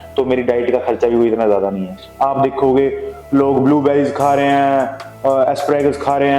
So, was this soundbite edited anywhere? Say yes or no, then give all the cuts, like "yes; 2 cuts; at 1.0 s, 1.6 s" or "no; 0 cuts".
yes; 1 cut; at 2.0 s